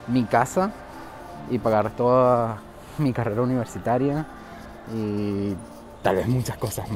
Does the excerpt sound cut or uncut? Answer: uncut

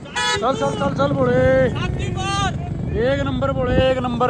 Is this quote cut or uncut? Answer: uncut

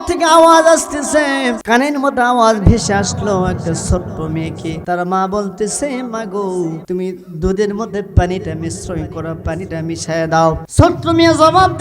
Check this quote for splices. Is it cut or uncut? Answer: cut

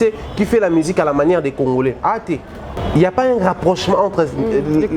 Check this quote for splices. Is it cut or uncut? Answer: cut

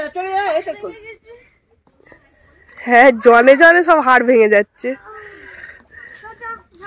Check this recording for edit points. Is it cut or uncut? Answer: uncut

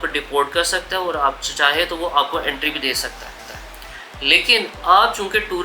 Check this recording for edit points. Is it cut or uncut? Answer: uncut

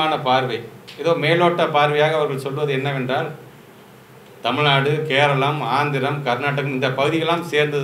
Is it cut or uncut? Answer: uncut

